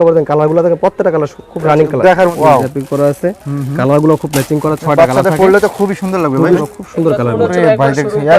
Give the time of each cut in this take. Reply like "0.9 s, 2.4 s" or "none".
2.3 s, 6.6 s

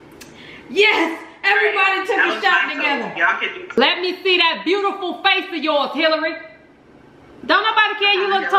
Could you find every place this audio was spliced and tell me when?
3.8 s

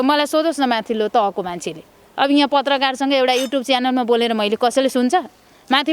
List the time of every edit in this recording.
none

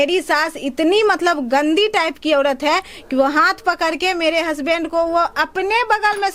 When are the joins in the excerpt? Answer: none

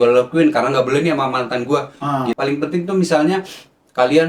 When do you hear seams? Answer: 2.4 s

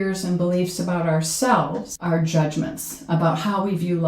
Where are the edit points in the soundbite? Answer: 1.9 s

